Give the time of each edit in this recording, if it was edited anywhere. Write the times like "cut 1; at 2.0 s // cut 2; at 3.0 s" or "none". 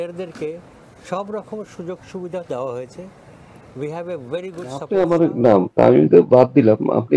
cut 1; at 4.8 s